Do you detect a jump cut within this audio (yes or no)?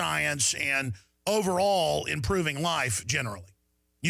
yes